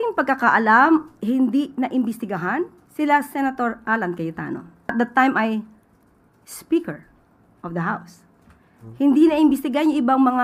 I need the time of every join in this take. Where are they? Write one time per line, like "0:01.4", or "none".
0:02.8
0:04.7